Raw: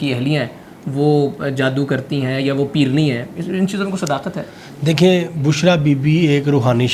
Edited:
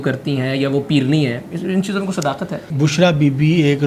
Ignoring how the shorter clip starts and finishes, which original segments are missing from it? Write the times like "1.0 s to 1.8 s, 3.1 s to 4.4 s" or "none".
4.5 s to 5.3 s